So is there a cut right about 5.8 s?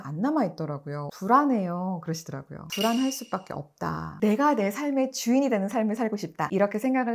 no; 2 cuts; at 2.6 s, 4.1 s

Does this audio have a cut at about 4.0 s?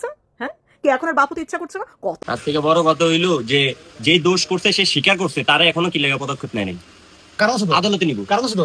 no; 1 cut; at 2.2 s

